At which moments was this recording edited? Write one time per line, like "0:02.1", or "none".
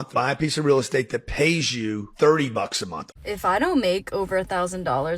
0:02.9